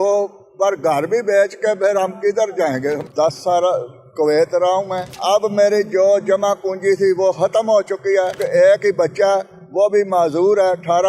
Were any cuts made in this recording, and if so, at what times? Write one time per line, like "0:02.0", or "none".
0:03.0
0:05.1
0:08.4